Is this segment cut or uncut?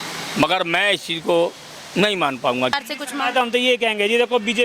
cut